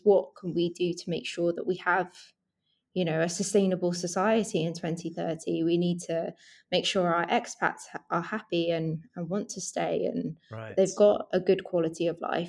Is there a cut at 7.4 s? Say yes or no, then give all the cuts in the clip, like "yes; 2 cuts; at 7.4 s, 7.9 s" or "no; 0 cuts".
no; 0 cuts